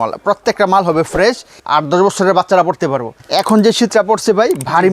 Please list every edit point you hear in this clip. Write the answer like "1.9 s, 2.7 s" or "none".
1.6 s, 3.2 s